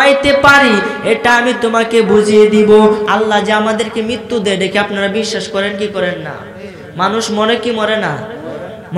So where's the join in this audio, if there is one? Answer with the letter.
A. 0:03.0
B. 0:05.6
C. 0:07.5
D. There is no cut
A